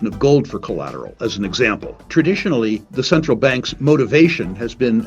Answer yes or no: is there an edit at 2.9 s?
yes